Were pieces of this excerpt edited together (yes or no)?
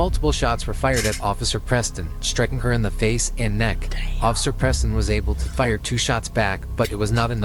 no